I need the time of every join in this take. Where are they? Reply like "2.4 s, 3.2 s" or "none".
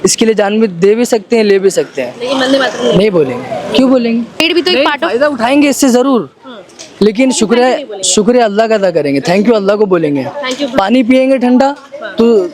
4.4 s